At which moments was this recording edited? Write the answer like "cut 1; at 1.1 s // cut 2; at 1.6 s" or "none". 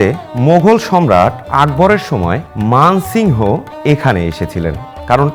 none